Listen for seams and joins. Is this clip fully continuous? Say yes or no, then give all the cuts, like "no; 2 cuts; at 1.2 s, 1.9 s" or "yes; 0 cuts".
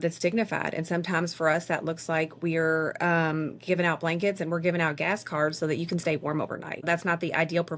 no; 1 cut; at 6.8 s